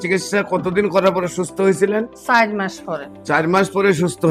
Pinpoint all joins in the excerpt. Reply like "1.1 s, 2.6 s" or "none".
none